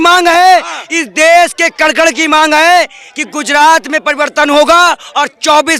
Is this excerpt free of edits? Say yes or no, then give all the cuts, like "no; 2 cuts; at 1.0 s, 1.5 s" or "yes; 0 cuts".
yes; 0 cuts